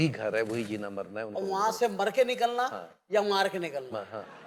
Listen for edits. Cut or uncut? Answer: uncut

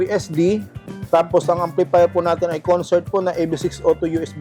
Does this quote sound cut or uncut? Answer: uncut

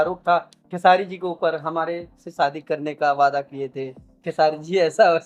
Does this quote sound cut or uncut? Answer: uncut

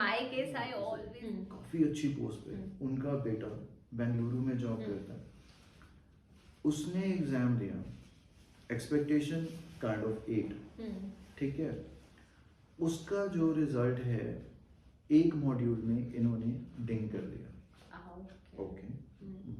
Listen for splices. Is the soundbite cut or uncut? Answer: cut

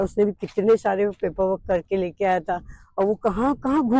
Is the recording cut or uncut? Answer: uncut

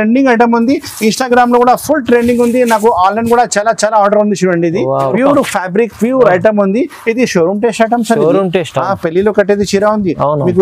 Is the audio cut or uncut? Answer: cut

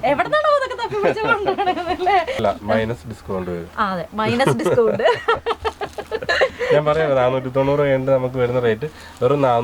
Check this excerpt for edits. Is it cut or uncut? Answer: cut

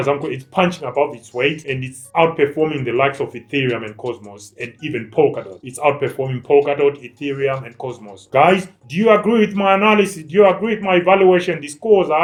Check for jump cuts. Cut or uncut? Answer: uncut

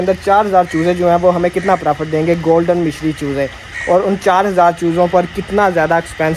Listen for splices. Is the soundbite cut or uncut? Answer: uncut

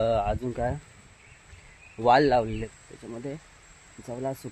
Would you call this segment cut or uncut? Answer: cut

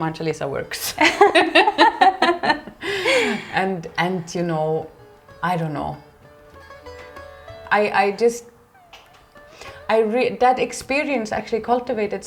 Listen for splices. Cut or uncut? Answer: uncut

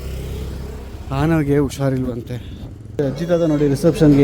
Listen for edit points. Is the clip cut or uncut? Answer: cut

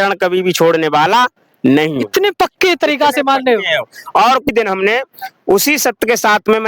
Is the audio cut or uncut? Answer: cut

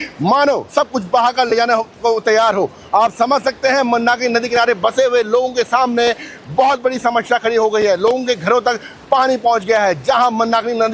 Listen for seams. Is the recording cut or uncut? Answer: uncut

